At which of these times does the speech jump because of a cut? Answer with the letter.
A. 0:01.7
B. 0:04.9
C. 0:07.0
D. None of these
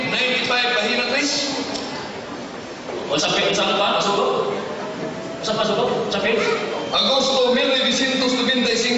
A